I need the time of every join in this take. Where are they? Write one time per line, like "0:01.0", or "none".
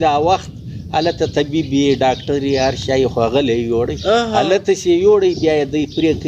none